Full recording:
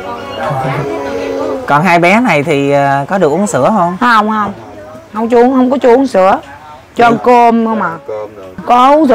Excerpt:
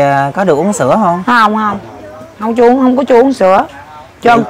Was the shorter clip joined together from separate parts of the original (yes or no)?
no